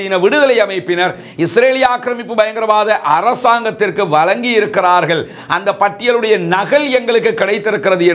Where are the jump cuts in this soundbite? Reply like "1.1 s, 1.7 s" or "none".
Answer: none